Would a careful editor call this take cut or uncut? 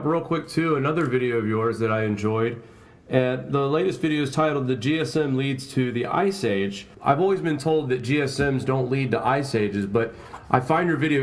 uncut